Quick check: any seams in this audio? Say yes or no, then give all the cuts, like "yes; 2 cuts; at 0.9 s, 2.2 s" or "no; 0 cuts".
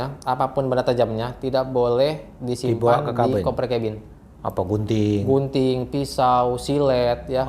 no; 0 cuts